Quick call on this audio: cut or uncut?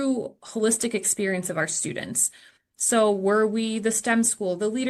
uncut